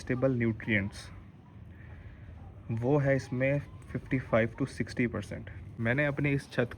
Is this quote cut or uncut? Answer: cut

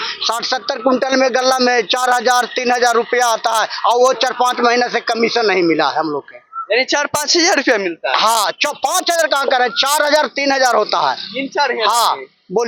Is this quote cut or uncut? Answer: uncut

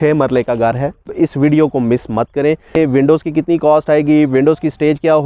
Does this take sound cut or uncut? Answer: cut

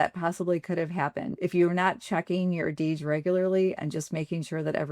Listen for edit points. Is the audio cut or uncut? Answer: cut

